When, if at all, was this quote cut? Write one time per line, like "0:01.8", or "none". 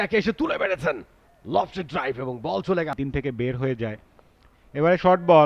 0:03.0